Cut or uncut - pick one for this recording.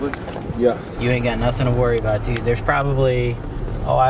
cut